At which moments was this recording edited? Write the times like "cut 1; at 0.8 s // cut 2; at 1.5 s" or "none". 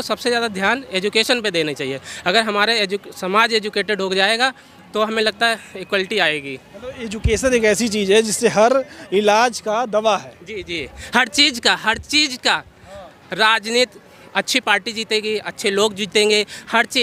none